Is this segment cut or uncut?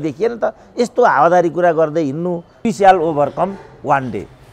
cut